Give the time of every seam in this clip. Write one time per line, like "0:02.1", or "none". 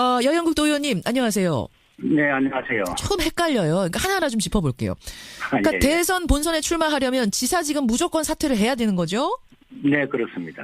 0:08.0